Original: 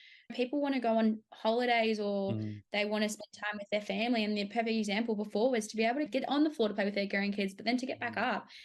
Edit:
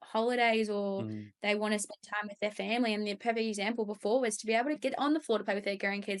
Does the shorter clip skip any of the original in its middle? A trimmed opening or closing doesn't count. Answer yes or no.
no